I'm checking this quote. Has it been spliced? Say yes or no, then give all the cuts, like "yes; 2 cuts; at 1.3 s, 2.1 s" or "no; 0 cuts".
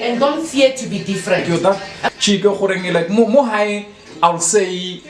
yes; 1 cut; at 1.4 s